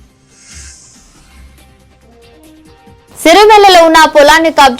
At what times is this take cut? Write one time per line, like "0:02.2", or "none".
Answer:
0:01.0